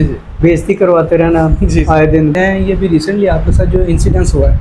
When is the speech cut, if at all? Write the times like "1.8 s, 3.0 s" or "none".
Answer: 2.3 s